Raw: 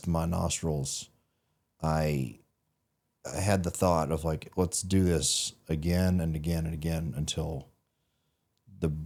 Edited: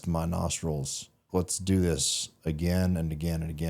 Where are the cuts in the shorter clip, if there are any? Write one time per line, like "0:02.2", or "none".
0:01.2

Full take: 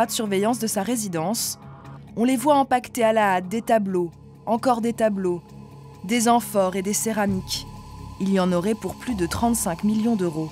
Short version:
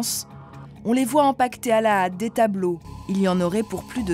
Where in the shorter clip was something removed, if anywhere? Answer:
0:02.9

